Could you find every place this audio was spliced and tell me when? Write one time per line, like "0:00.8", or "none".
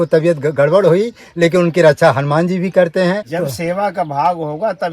0:03.3